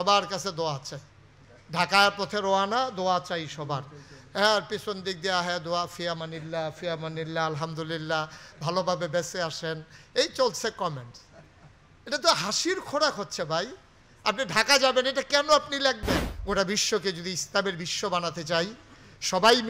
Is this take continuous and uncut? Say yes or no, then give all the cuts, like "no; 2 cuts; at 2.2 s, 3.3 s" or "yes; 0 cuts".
no; 1 cut; at 16.3 s